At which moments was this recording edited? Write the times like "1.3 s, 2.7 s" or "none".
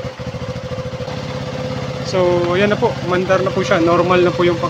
1.0 s